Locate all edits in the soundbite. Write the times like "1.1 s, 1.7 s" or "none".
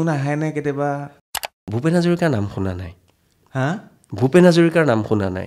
1.3 s